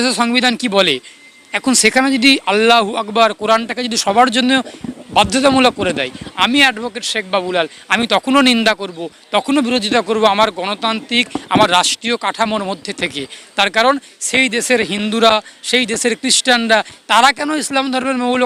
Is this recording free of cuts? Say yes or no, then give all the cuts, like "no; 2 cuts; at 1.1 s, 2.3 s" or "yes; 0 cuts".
yes; 0 cuts